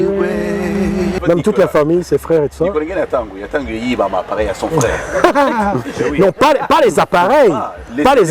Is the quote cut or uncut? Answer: cut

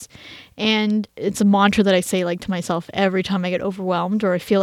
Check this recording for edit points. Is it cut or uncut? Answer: cut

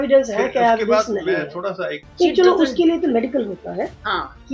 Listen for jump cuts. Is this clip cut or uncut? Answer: cut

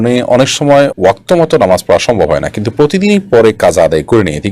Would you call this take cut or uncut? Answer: uncut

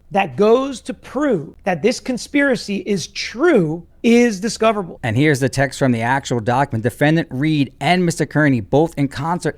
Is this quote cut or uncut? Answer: cut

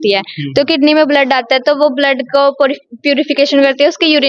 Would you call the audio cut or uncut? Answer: uncut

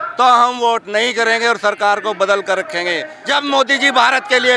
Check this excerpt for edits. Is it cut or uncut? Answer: cut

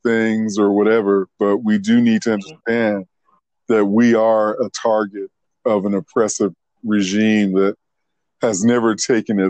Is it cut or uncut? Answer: uncut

